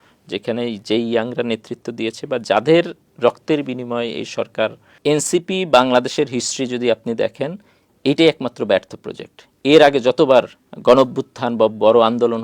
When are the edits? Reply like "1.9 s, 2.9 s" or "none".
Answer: 4.9 s, 10.6 s